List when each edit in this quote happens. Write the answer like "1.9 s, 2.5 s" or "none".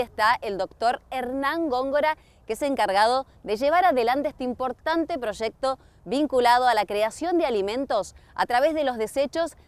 none